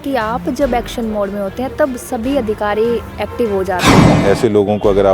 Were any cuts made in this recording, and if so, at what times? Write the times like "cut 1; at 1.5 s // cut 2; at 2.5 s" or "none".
cut 1; at 4.1 s

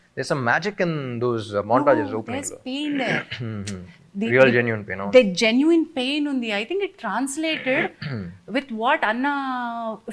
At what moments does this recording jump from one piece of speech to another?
none

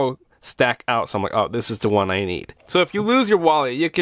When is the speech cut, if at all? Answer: cut 1; at 2.6 s

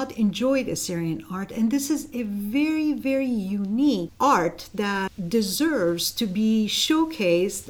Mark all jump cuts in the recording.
cut 1; at 4.1 s // cut 2; at 5.1 s

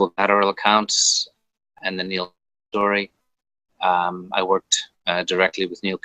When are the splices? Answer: none

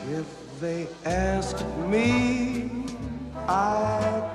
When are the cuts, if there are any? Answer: none

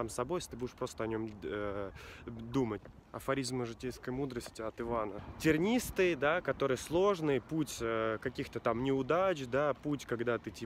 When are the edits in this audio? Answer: cut 1; at 2.8 s // cut 2; at 5.2 s

